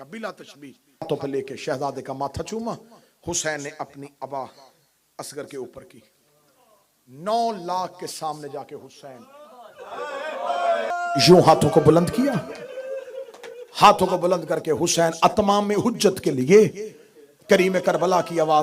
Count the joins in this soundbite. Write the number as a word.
two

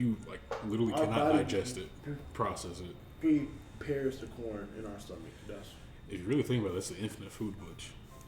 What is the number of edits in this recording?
zero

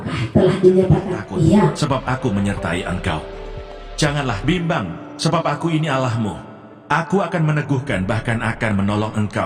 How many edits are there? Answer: one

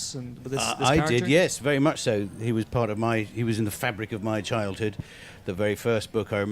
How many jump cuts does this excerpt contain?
one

